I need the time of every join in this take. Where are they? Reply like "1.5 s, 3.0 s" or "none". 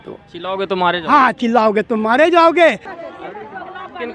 2.8 s